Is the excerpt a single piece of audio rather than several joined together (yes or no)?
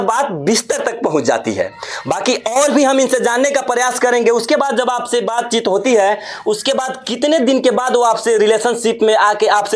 yes